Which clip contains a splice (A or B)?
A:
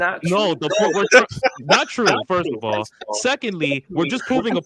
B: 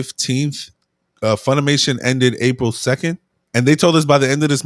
B